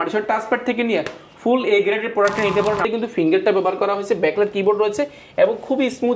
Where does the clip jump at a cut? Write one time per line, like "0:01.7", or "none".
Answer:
0:02.8